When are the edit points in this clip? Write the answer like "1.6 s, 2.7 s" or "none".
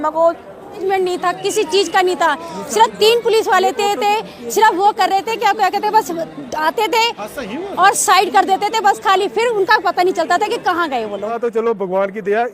0.8 s, 11.3 s